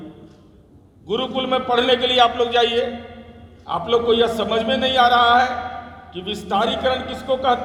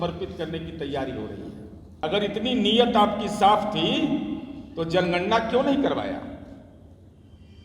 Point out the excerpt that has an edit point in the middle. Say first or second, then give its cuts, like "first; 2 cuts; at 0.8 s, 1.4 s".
second; 1 cut; at 1.9 s